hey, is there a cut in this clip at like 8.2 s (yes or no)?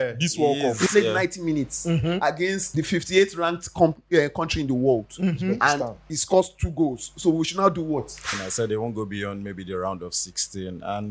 yes